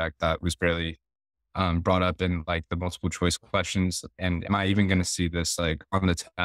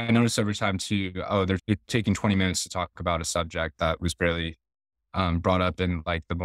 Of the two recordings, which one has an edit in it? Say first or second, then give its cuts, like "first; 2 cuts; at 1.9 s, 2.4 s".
second; 1 cut; at 1.6 s